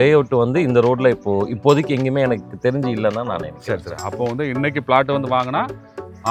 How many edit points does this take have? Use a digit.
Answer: 0